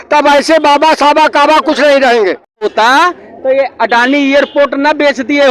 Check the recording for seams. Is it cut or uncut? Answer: cut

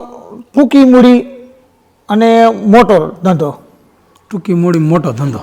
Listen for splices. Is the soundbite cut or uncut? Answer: uncut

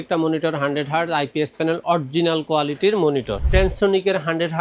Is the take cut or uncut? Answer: cut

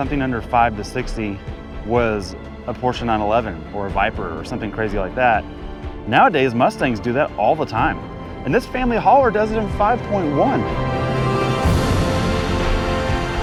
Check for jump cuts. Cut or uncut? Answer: uncut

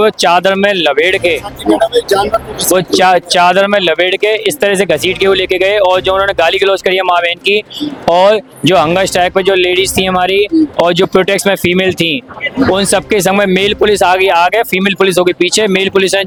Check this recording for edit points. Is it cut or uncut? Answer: uncut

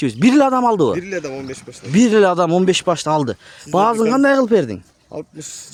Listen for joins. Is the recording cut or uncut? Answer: uncut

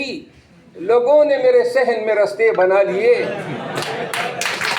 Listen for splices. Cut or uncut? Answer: uncut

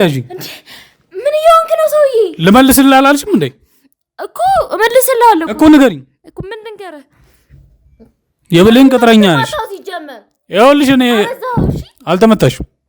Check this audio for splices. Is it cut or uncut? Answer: uncut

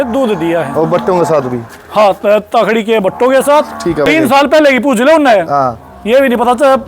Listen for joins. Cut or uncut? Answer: cut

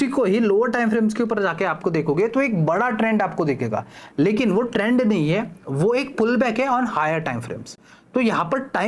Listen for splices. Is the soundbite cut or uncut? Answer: uncut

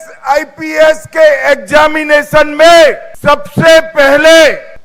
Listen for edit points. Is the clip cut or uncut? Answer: cut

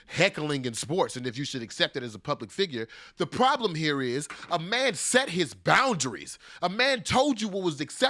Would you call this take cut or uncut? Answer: uncut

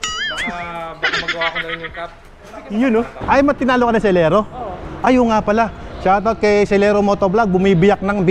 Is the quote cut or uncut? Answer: cut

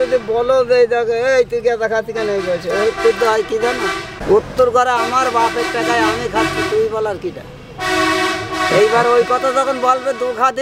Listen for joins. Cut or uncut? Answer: cut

